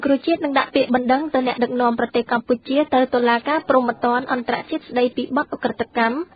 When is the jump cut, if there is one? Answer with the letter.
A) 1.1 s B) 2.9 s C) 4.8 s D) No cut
D